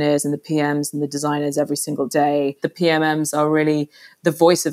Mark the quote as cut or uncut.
cut